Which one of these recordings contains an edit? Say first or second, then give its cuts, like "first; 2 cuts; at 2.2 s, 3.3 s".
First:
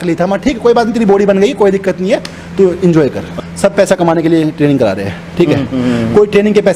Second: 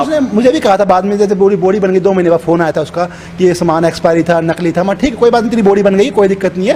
first; 1 cut; at 3.3 s